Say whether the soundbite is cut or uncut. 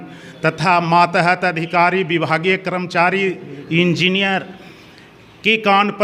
uncut